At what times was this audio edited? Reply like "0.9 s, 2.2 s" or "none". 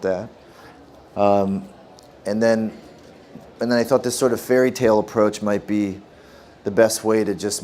6.7 s